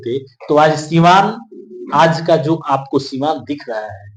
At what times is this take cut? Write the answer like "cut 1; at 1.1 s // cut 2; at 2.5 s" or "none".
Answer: none